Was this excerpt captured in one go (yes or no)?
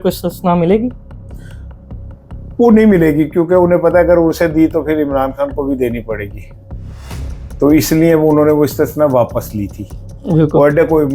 yes